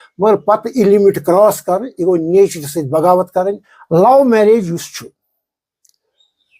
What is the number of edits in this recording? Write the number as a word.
one